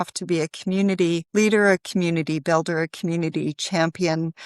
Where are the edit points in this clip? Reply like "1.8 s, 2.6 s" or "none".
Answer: 1.2 s